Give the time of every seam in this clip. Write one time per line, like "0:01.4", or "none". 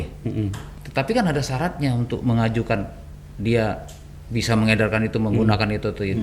none